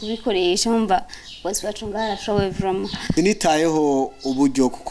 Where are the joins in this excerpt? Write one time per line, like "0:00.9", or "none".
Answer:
0:03.1

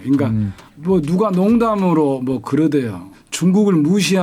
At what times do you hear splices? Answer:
none

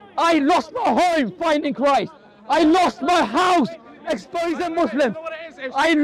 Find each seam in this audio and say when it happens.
none

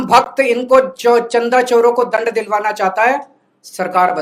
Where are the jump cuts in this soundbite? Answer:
none

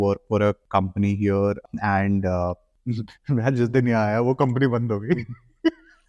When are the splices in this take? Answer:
none

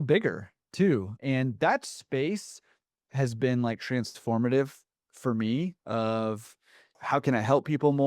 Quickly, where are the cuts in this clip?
0:01.2
0:06.9

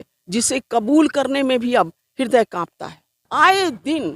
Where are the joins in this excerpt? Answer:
0:03.1

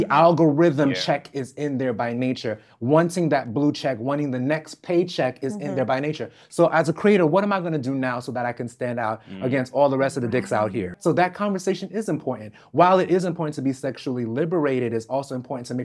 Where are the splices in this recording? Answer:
0:10.9

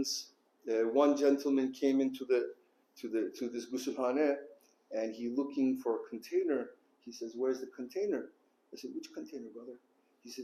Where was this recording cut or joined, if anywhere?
none

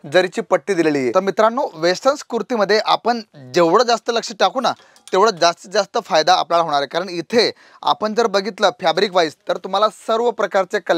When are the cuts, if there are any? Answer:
0:01.1

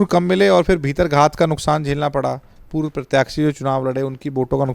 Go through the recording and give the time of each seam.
none

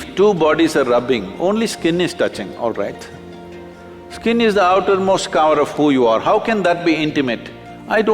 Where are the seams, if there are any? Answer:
none

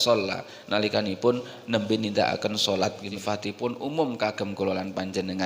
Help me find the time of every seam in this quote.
0:03.1

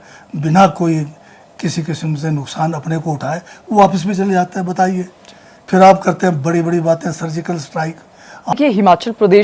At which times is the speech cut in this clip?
0:08.5

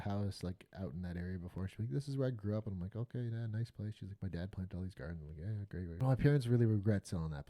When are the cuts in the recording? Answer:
0:06.0

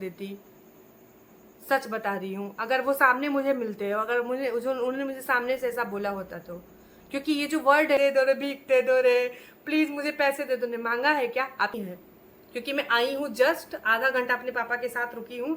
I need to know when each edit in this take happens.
0:08.0
0:11.7

